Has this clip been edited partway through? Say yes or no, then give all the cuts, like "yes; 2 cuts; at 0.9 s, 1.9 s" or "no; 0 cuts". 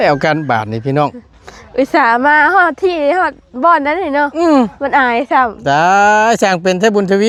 no; 0 cuts